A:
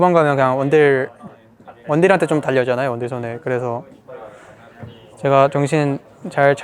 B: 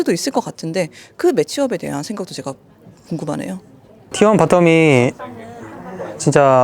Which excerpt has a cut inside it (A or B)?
B